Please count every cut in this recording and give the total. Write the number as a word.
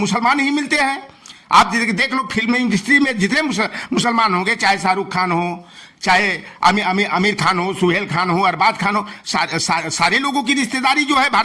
zero